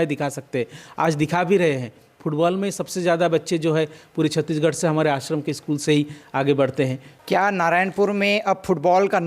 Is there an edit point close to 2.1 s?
no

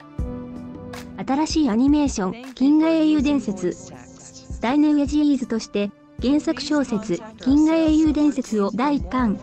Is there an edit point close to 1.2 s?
yes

